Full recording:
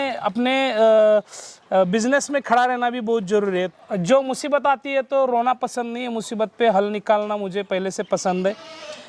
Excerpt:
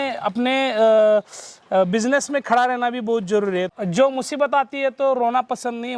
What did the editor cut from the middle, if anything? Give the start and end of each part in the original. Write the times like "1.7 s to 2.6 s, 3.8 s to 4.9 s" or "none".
3.8 s to 3.9 s